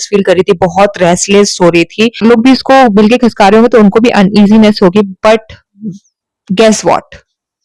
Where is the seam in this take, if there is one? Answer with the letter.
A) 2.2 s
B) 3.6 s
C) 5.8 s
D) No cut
A